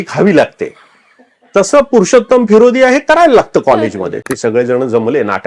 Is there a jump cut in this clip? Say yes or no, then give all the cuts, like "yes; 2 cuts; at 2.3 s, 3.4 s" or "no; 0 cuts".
yes; 1 cut; at 4.2 s